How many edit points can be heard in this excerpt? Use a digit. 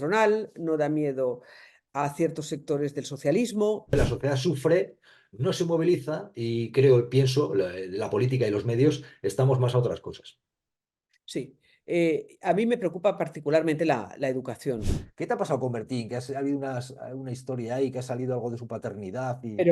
2